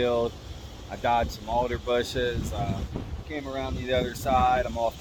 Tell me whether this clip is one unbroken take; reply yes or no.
yes